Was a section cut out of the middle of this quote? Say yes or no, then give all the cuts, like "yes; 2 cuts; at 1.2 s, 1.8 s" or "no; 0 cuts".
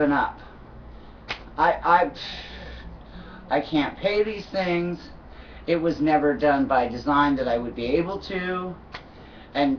no; 0 cuts